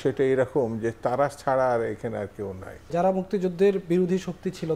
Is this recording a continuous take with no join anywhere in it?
no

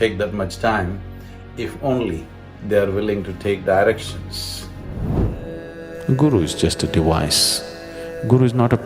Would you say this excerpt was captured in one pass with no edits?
no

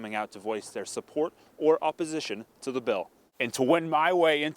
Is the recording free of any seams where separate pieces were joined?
no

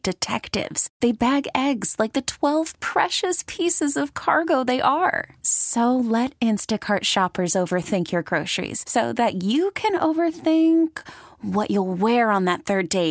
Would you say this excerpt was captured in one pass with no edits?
yes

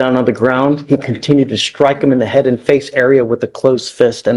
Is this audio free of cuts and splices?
yes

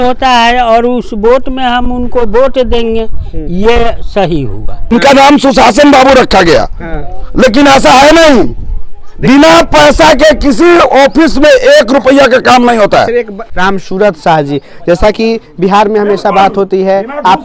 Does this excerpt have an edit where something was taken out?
yes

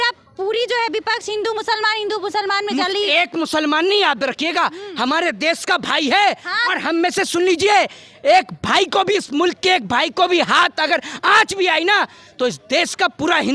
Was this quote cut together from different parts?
no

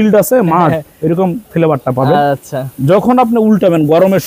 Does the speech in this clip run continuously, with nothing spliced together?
yes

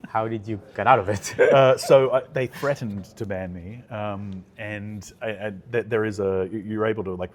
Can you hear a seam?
no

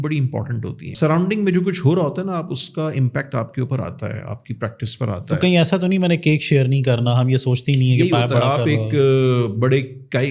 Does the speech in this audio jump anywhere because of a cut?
yes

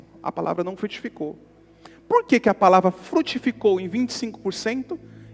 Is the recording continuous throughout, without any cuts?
yes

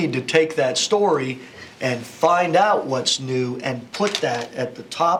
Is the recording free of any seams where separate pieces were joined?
yes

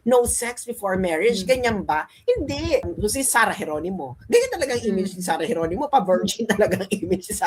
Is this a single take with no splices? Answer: no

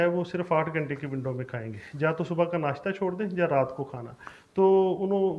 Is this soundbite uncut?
yes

